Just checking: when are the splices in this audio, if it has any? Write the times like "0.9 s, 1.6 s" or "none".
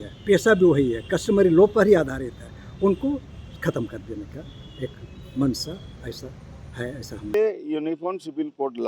7.3 s